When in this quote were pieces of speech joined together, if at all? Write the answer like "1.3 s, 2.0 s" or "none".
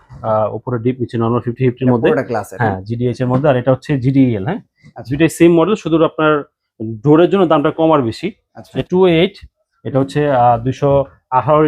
8.8 s

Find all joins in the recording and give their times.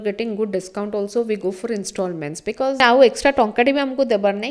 2.8 s

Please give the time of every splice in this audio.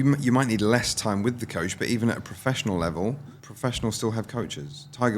3.3 s

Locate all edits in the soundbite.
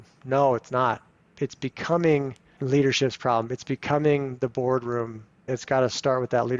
1.3 s, 5.5 s

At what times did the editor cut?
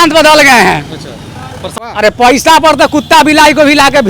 1.9 s

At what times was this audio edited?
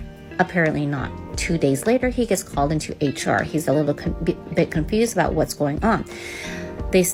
none

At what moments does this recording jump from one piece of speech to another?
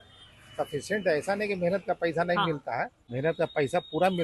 3.0 s

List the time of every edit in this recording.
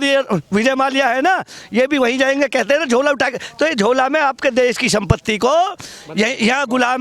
none

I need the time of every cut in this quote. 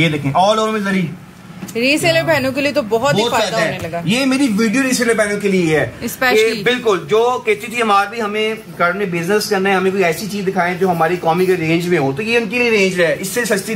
none

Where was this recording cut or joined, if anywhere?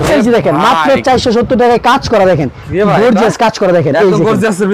none

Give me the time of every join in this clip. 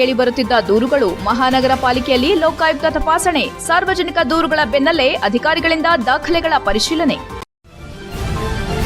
7.4 s

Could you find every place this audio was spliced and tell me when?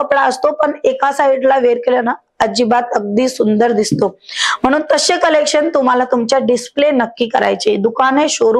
none

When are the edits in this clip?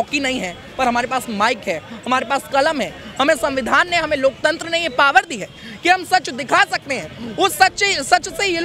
none

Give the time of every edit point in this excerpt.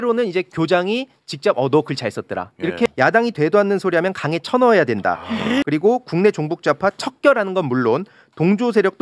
2.9 s, 5.6 s

